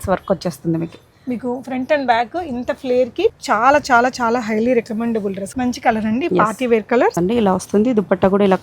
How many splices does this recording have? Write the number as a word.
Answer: three